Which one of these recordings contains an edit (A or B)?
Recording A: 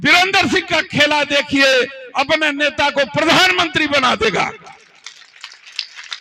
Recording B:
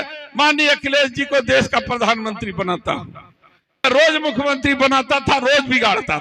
B